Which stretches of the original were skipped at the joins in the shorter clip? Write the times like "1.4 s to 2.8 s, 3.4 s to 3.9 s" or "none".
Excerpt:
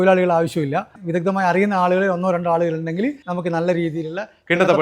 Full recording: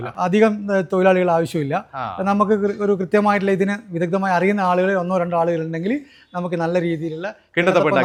2.0 s to 3.8 s, 6.1 s to 6.3 s